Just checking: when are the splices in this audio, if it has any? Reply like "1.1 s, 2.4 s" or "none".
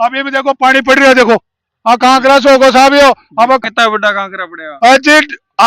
3.6 s